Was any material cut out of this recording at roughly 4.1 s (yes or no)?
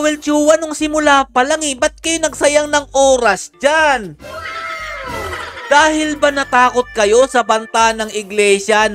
no